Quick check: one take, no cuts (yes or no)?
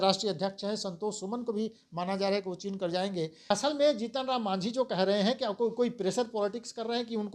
no